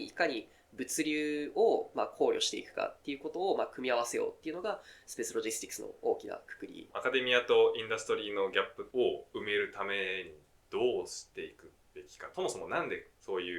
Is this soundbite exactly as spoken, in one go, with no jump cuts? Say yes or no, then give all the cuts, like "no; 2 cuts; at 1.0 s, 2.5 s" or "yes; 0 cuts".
no; 3 cuts; at 6.9 s, 8.8 s, 12.3 s